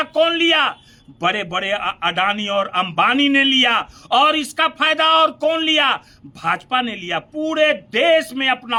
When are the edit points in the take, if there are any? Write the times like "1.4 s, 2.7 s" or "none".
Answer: none